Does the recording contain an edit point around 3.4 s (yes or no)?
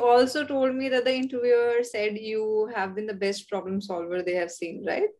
no